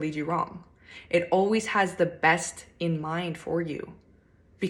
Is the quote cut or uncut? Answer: uncut